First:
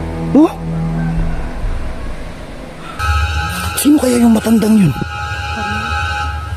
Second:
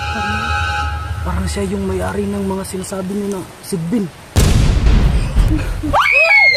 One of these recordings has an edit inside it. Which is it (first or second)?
first